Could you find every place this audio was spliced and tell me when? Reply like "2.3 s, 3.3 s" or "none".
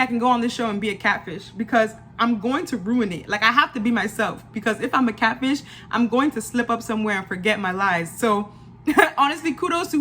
none